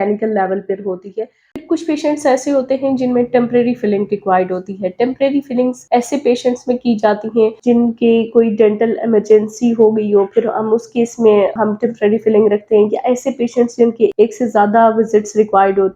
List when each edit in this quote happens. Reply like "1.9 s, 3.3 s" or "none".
1.5 s